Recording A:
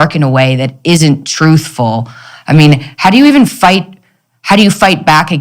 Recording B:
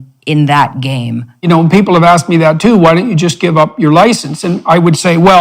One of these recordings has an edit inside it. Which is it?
B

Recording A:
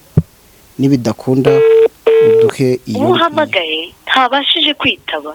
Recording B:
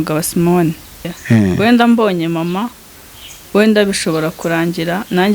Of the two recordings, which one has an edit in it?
B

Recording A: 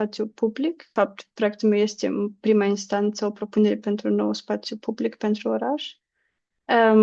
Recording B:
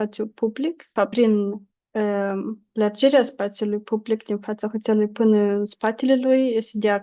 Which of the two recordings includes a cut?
B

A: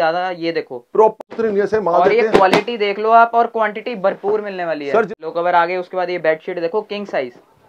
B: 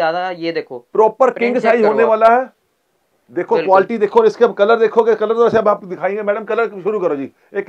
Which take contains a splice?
A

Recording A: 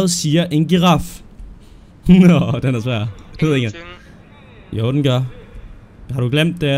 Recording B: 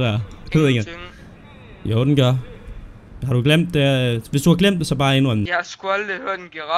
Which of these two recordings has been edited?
B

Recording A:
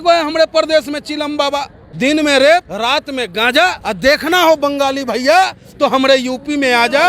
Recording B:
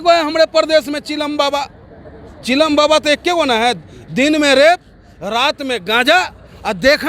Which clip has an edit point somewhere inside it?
A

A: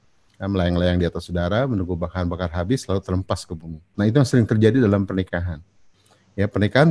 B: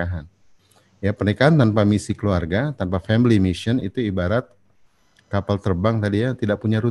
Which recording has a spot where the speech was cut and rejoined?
A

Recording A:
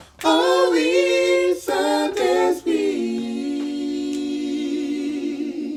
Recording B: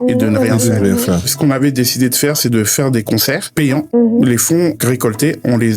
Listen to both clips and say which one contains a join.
B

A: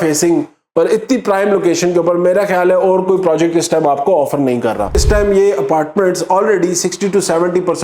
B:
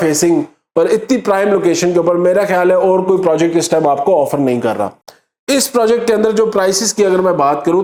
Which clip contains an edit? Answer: A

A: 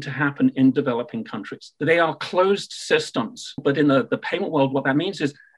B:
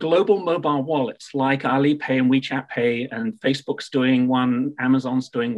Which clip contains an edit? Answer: A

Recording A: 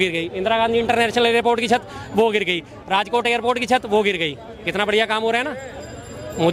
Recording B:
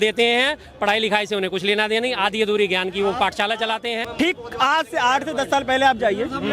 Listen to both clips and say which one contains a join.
B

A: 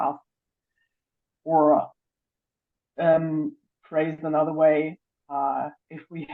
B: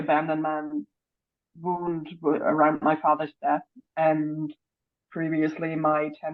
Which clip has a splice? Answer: A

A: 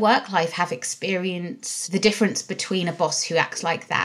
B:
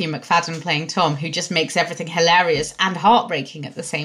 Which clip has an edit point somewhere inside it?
A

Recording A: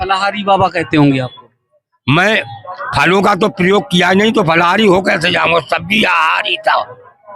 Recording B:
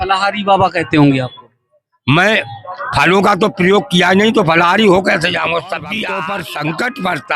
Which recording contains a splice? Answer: B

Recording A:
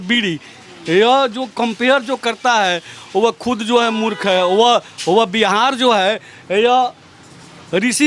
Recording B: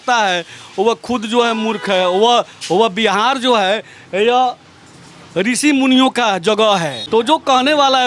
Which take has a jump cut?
B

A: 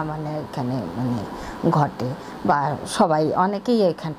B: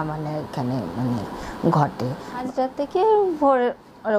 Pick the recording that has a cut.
B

